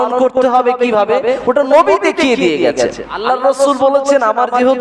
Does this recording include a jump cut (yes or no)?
yes